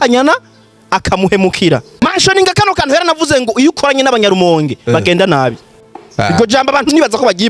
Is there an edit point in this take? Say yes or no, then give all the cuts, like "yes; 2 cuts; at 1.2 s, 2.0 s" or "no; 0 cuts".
yes; 1 cut; at 2.0 s